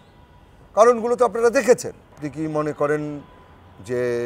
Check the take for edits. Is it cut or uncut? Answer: cut